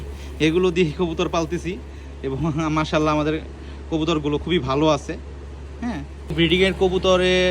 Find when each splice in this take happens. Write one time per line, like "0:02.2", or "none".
0:06.3